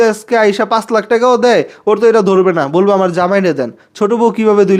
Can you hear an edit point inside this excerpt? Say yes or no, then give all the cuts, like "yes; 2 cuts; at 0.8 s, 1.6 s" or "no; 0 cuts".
no; 0 cuts